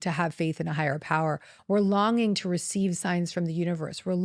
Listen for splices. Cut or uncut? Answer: cut